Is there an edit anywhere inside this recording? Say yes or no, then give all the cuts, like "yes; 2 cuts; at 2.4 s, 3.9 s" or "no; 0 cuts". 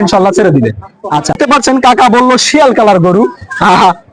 yes; 1 cut; at 1.4 s